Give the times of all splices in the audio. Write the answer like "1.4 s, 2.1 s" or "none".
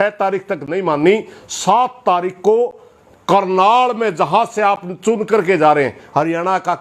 none